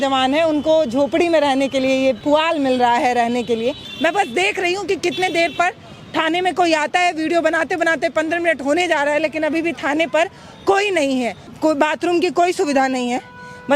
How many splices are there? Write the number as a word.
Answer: two